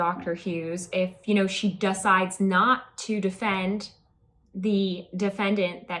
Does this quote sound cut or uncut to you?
uncut